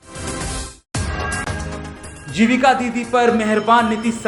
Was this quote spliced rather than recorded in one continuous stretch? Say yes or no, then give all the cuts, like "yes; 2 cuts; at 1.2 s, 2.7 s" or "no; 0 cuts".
yes; 1 cut; at 2.0 s